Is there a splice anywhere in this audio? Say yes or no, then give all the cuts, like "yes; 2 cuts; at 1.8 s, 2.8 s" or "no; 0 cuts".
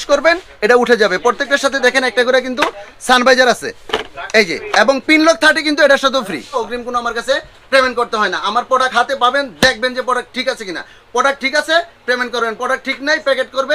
yes; 1 cut; at 6.5 s